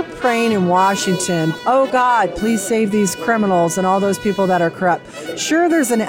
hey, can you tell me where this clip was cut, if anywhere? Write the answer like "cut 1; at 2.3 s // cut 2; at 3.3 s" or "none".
cut 1; at 1.6 s